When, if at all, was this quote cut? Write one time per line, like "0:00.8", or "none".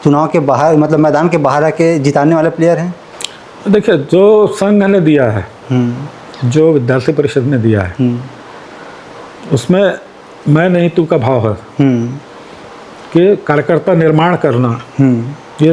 none